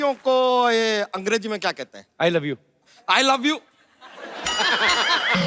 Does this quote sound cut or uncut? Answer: uncut